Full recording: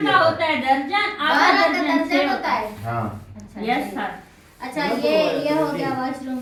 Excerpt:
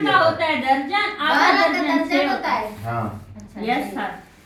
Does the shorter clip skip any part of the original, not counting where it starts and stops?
no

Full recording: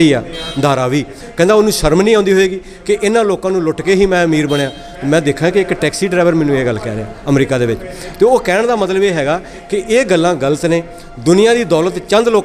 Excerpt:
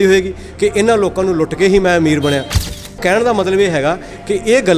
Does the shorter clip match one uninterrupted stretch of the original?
no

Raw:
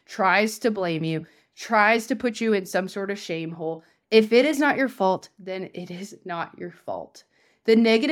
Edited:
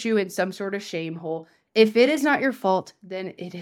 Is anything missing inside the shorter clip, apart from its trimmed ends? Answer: no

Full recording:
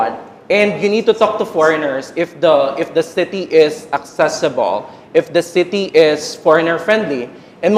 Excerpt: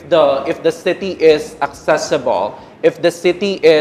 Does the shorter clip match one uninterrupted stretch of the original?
yes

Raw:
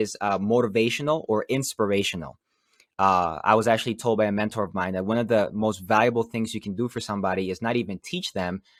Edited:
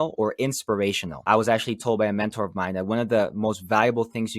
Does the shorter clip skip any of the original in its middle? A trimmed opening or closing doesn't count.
yes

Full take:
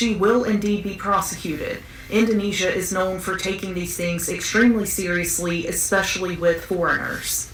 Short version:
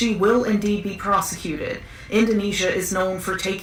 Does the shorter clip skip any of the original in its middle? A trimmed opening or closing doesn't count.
no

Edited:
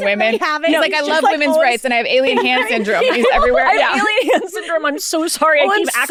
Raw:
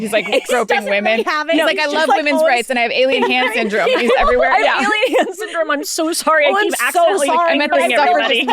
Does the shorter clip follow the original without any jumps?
yes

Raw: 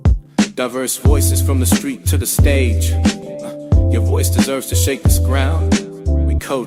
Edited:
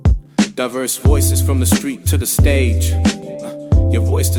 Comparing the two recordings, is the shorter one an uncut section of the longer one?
yes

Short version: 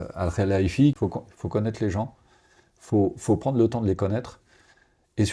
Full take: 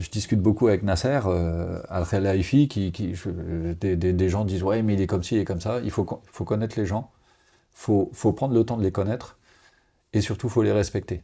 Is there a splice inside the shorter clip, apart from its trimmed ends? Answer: yes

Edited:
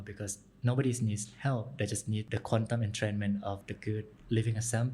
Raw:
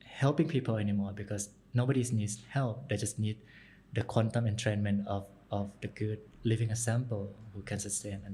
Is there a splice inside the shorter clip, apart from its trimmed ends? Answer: yes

